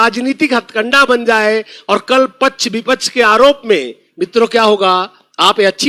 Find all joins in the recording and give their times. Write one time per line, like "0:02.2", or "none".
none